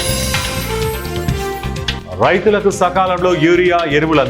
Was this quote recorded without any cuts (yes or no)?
no